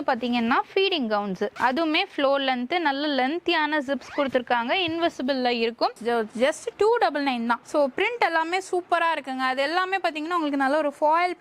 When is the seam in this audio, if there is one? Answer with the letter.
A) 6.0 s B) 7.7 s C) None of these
A